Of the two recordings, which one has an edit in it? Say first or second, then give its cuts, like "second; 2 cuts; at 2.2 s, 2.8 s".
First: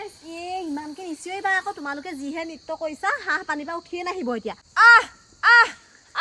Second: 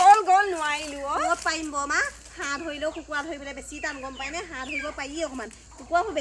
first; 1 cut; at 4.6 s